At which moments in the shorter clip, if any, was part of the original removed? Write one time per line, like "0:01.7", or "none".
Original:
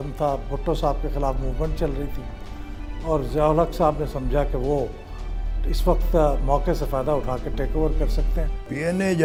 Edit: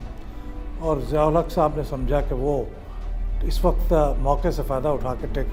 none